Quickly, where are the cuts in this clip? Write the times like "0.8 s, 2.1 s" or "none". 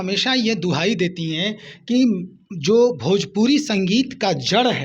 none

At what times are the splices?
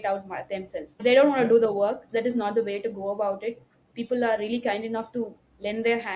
1.0 s, 2.1 s

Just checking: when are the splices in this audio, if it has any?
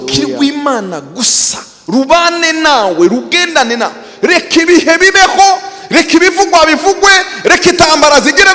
none

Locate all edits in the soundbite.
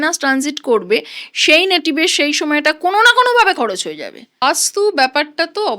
4.4 s

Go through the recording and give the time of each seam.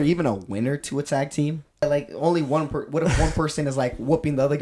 1.8 s

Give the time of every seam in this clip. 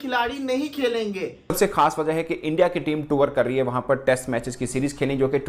1.5 s

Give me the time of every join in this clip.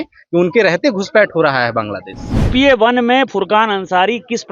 2.5 s

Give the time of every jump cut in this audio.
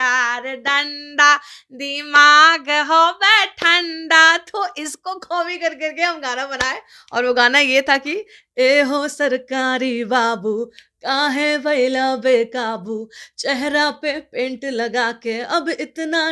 none

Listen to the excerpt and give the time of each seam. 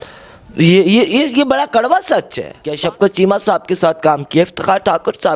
2.7 s

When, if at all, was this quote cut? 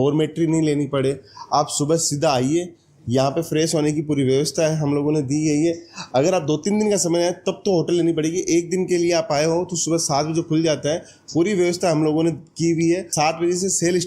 none

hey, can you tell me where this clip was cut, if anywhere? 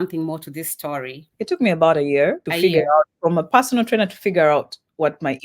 1.2 s, 2.5 s

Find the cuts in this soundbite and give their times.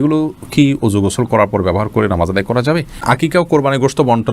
3.0 s

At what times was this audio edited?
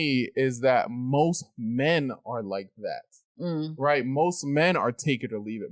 none

